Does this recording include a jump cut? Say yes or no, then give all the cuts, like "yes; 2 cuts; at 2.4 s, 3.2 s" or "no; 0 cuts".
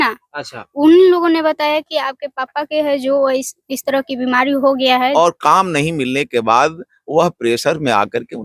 yes; 1 cut; at 5.1 s